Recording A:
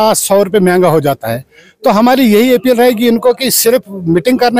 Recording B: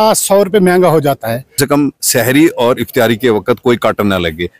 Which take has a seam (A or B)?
B